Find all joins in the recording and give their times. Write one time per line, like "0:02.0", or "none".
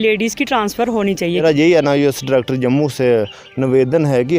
0:01.4

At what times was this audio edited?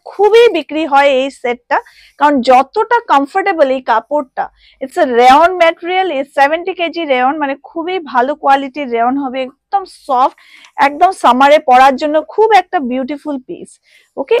none

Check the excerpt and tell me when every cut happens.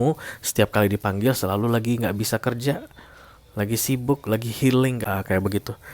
0:05.0

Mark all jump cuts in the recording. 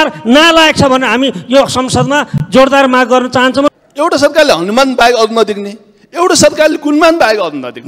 0:03.7

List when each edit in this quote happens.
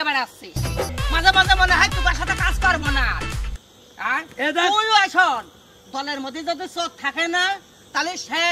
none

